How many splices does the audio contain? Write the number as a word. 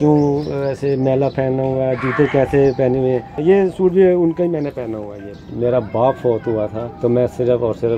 three